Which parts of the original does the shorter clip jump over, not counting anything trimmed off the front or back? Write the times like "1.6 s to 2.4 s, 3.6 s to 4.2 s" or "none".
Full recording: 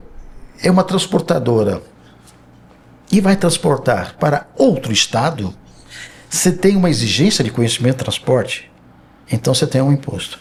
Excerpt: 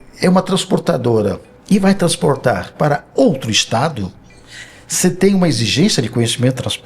1.9 s to 2.9 s